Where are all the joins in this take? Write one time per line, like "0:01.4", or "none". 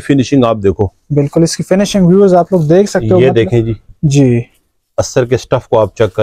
none